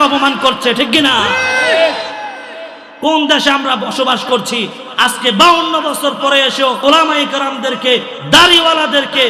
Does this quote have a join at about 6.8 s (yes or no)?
yes